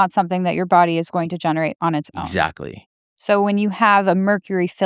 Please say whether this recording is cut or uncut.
uncut